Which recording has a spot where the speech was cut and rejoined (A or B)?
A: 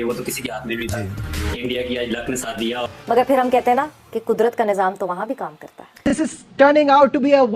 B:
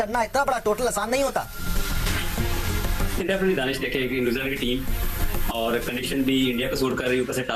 A